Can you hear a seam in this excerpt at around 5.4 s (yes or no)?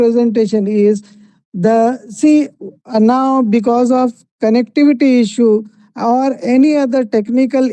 no